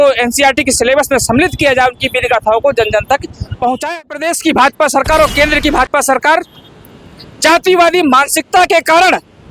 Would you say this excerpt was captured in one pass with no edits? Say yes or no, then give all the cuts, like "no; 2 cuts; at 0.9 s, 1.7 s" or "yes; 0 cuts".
no; 1 cut; at 4.0 s